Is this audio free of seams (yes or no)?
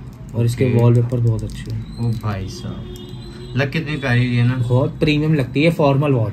yes